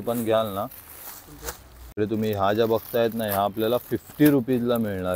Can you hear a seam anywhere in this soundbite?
yes; 1 cut; at 1.9 s

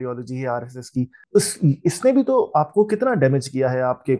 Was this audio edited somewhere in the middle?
yes; 1 cut; at 1.2 s

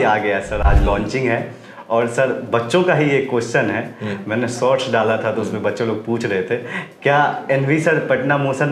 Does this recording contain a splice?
no; 0 cuts

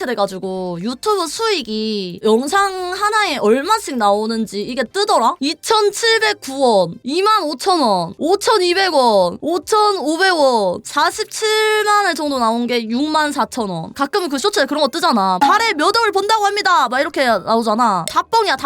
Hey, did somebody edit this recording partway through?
yes; 2 cuts; at 5.4 s, 13.9 s

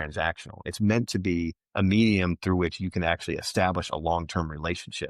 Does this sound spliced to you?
no; 0 cuts

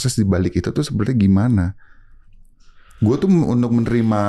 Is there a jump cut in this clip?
no; 0 cuts

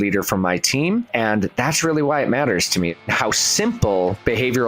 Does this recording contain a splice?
yes; 2 cuts; at 1.1 s, 3.1 s

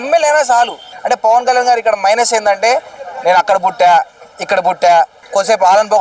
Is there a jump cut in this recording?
yes; 1 cut; at 0.9 s

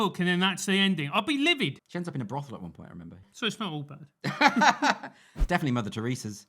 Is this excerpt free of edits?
no; 3 cuts; at 1.8 s, 3.3 s, 5.3 s

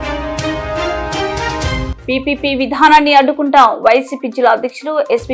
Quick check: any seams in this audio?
yes; 1 cut; at 1.9 s

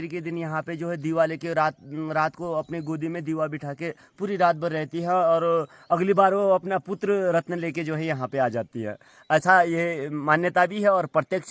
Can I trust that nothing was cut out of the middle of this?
yes; 0 cuts

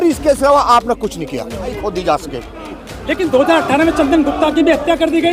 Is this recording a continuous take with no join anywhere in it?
no; 1 cut; at 1.8 s

